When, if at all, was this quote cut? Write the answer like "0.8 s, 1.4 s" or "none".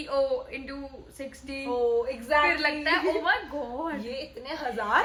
none